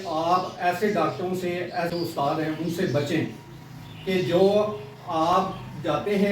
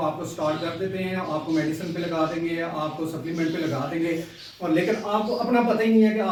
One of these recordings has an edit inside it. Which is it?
first; 1 cut; at 1.9 s

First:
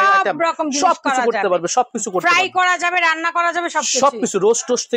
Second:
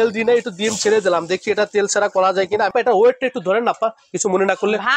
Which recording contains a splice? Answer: second; 1 cut; at 2.7 s

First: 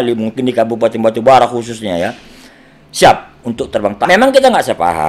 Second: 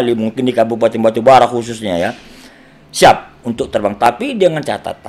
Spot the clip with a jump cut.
first; 1 cut; at 4.1 s

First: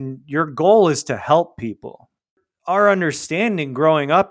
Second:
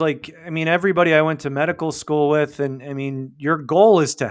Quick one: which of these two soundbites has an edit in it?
first; 1 cut; at 2.3 s

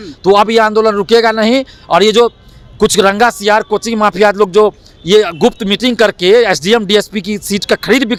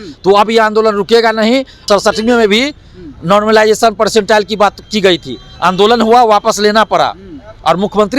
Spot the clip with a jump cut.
second; 1 cut; at 1.7 s

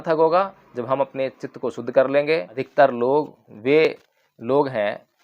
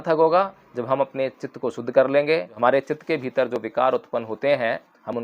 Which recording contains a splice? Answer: first; 1 cut; at 2.5 s

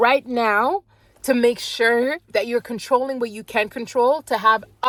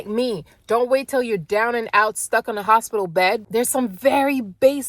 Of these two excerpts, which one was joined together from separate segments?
second; 1 cut; at 3.4 s

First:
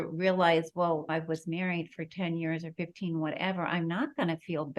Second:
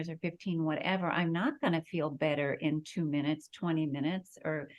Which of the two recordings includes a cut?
first; 1 cut; at 1.1 s

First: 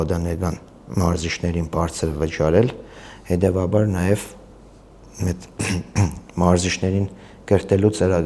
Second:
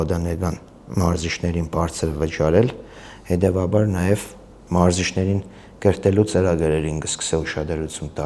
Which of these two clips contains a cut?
second; 1 cut; at 4.6 s

